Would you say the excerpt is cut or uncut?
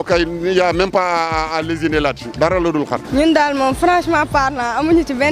cut